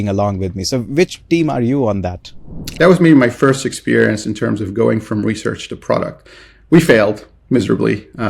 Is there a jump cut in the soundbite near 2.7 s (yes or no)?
yes